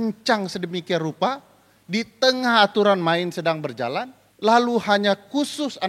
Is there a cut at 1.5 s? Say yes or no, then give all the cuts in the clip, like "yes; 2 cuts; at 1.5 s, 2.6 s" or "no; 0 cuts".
no; 1 cut; at 4.2 s